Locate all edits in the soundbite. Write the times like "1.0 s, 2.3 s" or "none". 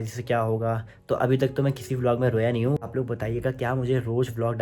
2.8 s